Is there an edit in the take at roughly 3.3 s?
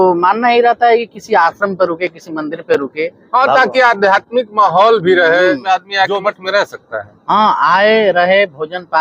no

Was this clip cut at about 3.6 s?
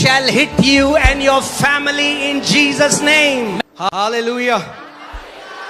yes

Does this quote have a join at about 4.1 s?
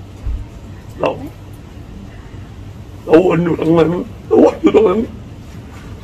yes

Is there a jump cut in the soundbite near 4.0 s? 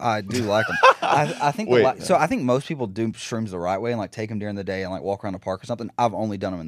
no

